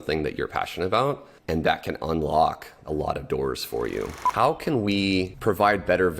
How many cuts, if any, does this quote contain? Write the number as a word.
four